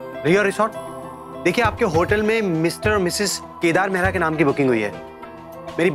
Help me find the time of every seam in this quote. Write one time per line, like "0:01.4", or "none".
none